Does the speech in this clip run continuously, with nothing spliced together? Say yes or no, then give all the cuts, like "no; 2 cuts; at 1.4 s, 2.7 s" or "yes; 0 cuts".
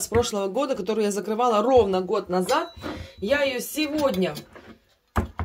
yes; 0 cuts